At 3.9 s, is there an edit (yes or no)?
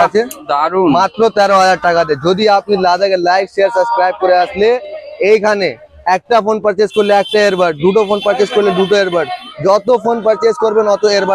no